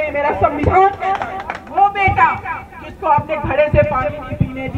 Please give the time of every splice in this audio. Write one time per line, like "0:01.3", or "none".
0:01.6

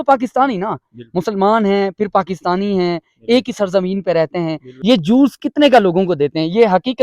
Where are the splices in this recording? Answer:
0:04.7

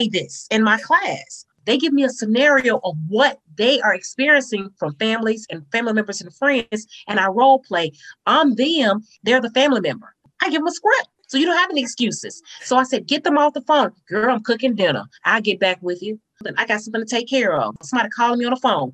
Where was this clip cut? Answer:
none

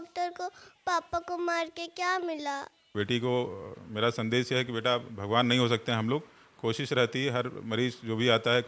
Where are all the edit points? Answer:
0:02.9

